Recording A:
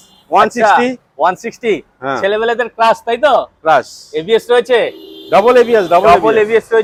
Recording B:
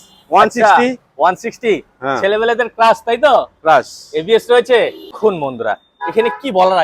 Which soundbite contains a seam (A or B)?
B